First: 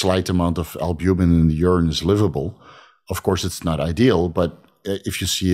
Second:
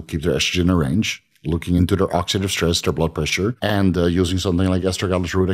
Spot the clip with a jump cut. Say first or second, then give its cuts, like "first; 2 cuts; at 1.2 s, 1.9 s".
second; 2 cuts; at 1.8 s, 3.6 s